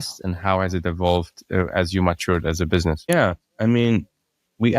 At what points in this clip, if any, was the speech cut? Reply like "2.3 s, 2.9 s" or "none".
3.1 s